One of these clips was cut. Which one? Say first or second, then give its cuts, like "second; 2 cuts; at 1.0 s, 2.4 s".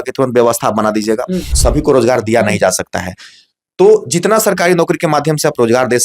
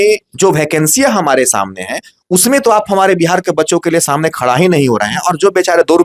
first; 1 cut; at 1.5 s